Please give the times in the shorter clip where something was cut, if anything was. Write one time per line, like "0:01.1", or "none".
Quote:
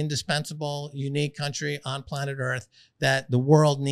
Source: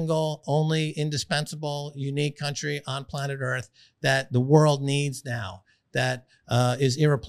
none